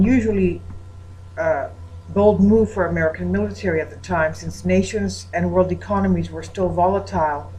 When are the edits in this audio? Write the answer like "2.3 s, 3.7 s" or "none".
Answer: none